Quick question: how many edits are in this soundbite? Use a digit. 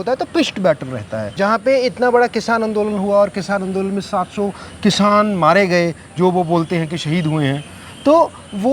1